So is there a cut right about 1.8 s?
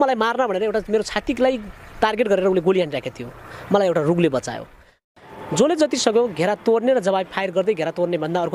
no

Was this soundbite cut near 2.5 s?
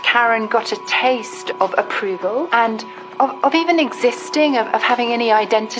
yes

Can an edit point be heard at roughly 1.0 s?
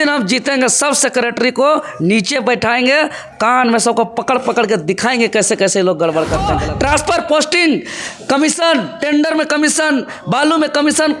no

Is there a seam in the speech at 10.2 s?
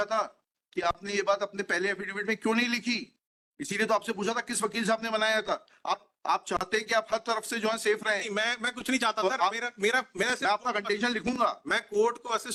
no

